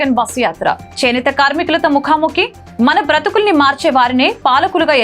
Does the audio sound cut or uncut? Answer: uncut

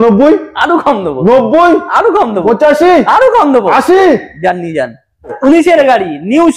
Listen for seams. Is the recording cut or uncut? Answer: cut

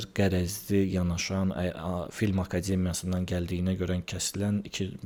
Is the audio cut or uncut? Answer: uncut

